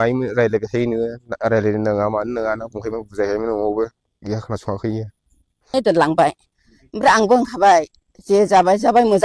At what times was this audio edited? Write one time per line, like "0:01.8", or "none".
0:05.7